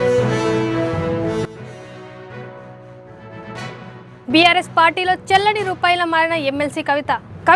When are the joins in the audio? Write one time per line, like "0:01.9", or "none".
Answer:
0:03.5